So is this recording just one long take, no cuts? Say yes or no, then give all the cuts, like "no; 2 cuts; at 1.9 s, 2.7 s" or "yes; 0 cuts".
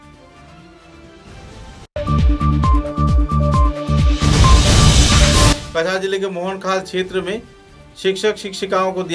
yes; 0 cuts